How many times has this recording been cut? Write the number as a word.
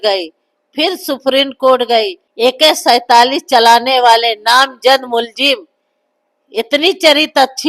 one